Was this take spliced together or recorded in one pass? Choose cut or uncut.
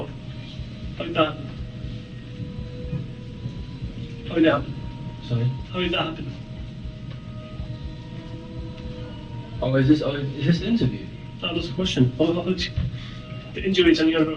uncut